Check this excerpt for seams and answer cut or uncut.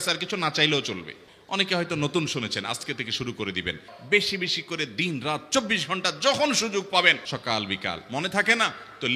cut